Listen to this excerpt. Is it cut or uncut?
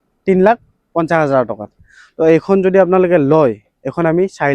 cut